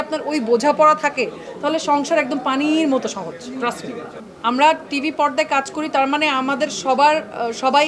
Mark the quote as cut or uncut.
uncut